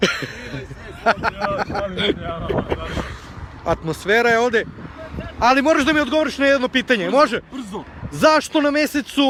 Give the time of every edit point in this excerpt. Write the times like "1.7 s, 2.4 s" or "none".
none